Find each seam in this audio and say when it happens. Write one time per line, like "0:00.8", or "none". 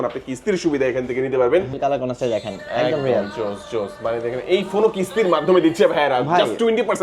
0:01.7